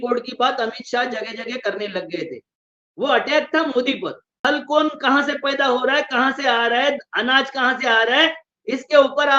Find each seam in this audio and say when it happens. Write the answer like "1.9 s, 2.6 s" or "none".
4.3 s